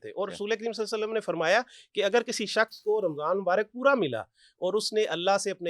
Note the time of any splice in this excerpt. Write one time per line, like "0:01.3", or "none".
none